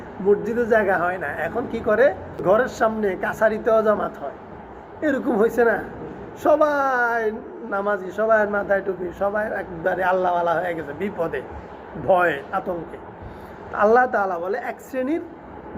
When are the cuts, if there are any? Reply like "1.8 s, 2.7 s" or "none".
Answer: 2.6 s